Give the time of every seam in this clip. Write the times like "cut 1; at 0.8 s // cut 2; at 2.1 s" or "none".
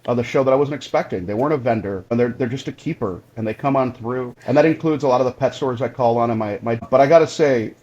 cut 1; at 2.1 s // cut 2; at 4.3 s // cut 3; at 6.8 s